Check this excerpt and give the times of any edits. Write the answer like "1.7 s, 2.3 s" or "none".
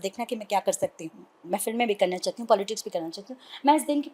1.5 s